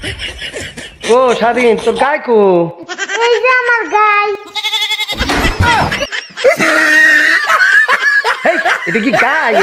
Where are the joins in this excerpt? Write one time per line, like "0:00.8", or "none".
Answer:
none